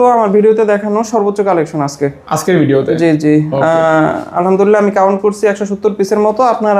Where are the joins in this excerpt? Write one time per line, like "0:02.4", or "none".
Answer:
none